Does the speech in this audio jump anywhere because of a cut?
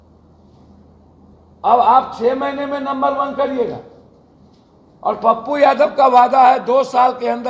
no; 0 cuts

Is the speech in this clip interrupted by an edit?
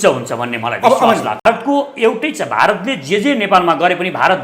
yes; 1 cut; at 1.5 s

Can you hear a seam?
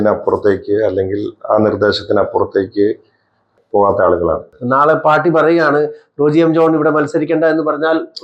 yes; 2 cuts; at 3.5 s, 4.5 s

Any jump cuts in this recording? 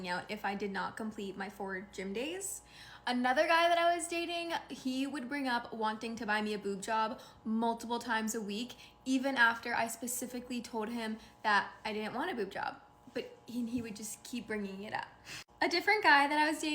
yes; 1 cut; at 9.6 s

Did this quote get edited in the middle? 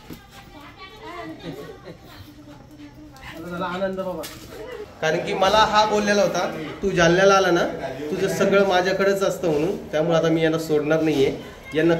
yes; 1 cut; at 4.8 s

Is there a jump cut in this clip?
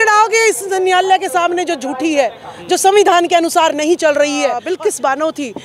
yes; 1 cut; at 4.7 s

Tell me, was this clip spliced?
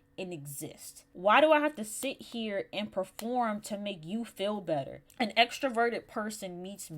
yes; 2 cuts; at 1.0 s, 5.0 s

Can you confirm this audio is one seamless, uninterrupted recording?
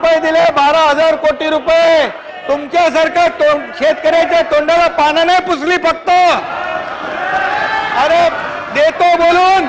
yes; 0 cuts

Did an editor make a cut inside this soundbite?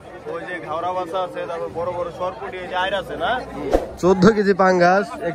yes; 1 cut; at 3.9 s

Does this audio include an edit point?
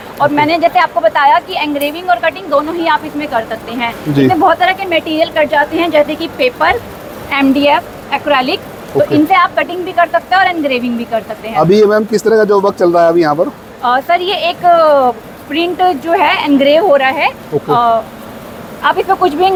no; 0 cuts

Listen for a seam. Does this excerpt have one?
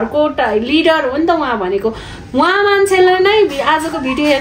no; 0 cuts

